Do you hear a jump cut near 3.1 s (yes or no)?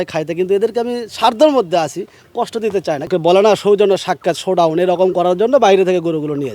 yes